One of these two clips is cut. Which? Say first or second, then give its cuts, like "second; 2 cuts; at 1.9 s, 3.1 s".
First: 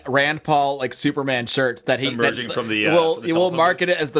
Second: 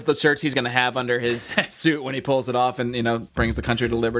second; 1 cut; at 3.3 s